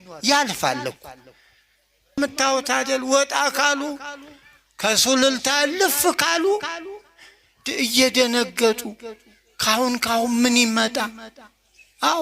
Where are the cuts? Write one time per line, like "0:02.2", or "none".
0:02.2